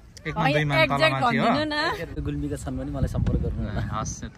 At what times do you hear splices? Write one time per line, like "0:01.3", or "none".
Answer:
0:02.2